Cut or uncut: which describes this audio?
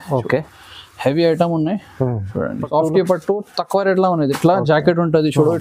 cut